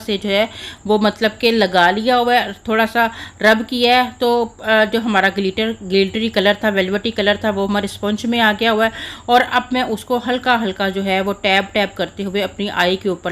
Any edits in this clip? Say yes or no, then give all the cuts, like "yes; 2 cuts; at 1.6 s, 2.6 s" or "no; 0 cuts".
no; 0 cuts